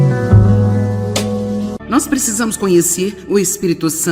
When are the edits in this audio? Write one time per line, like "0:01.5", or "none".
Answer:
0:01.8